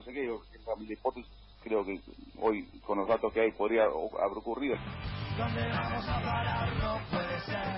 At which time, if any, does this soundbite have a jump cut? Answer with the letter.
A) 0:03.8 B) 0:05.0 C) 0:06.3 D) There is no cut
B